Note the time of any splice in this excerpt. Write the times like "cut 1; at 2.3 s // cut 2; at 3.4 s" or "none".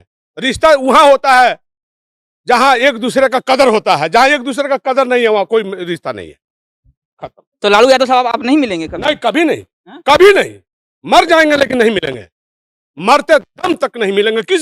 none